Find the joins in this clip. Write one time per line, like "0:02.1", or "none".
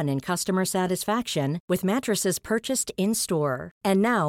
none